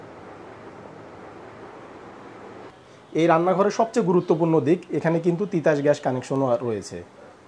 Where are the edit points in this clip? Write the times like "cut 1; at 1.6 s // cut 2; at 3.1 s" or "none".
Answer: cut 1; at 2.7 s